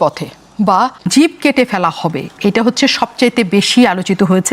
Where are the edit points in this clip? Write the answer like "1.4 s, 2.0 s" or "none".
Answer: 1.0 s